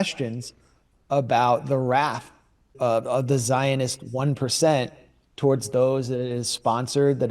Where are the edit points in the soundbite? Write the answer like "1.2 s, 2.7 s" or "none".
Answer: 2.7 s